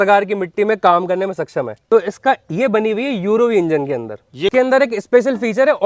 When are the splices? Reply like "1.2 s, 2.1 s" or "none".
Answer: 1.8 s, 4.5 s